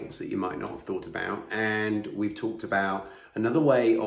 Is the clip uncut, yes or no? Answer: yes